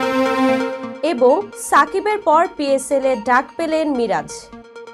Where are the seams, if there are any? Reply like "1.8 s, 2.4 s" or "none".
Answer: none